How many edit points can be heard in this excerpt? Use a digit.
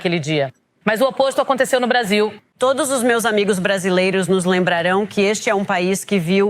1